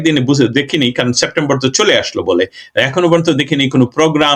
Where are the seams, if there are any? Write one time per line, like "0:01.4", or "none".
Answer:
none